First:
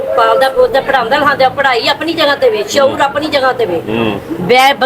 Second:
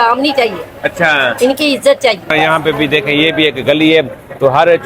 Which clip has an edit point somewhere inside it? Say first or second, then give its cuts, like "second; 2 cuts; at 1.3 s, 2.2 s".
second; 1 cut; at 2.3 s